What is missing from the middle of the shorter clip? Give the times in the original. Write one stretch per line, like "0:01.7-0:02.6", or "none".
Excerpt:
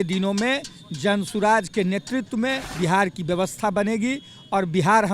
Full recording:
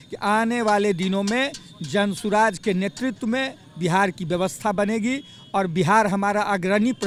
0:03.6-0:03.7